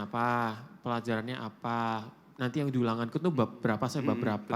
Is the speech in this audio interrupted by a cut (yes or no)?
no